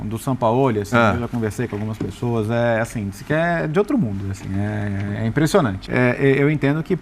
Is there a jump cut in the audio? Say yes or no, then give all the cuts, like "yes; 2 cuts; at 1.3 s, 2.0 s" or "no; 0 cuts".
yes; 1 cut; at 5.8 s